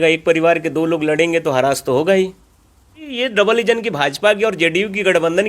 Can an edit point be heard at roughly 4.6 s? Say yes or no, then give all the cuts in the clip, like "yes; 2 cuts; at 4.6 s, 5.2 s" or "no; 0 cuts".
no; 1 cut; at 3.2 s